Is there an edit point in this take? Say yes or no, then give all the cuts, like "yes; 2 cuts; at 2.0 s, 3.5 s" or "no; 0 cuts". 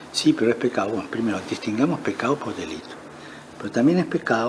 no; 0 cuts